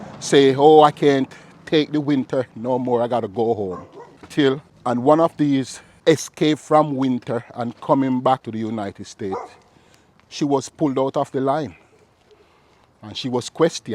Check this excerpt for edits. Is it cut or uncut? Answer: cut